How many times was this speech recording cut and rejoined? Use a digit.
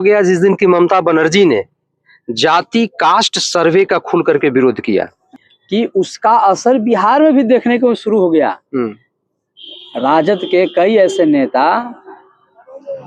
1